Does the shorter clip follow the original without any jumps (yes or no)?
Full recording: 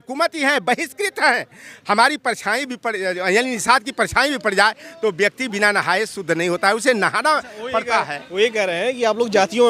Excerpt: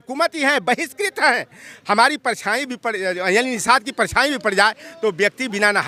yes